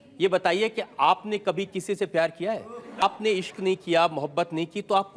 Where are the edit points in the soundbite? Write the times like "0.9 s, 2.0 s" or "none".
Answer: 3.0 s